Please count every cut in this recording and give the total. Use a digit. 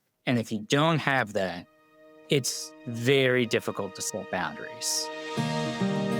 1